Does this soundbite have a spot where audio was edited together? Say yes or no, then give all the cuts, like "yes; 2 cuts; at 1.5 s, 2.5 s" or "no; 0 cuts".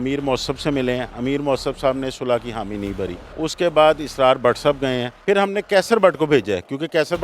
yes; 2 cuts; at 3.2 s, 5.1 s